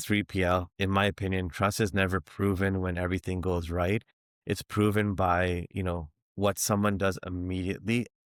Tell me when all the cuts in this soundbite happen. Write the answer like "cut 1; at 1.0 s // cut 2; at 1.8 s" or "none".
none